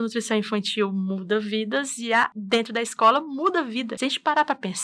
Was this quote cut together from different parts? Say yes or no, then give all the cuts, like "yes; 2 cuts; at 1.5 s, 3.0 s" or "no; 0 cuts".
yes; 2 cuts; at 2.4 s, 3.9 s